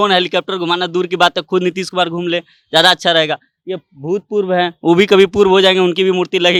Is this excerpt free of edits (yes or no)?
yes